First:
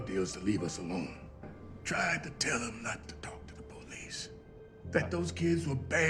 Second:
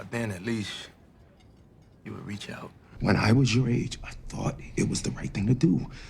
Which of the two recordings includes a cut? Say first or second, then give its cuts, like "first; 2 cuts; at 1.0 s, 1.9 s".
second; 1 cut; at 2.9 s